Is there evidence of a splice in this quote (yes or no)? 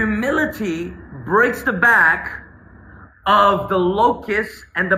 no